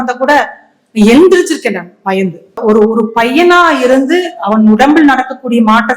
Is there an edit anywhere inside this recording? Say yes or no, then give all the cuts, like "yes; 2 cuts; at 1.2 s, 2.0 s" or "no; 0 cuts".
yes; 1 cut; at 2.6 s